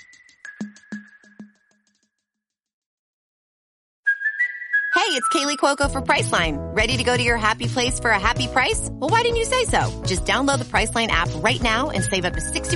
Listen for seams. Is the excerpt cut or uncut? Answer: uncut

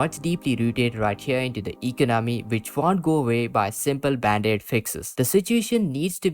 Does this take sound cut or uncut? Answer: cut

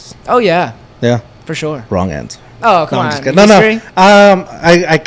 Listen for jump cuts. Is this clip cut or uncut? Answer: uncut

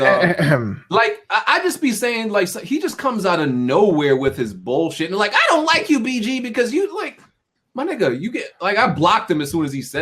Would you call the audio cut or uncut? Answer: uncut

